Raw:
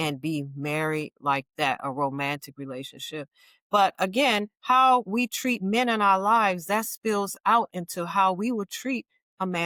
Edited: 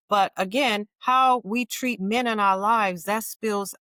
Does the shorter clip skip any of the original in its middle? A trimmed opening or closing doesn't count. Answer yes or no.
no